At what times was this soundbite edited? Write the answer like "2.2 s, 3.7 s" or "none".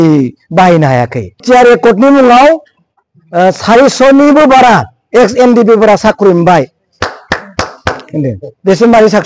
1.4 s